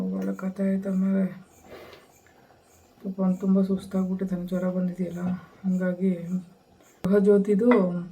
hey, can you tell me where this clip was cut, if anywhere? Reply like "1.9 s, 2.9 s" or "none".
7.1 s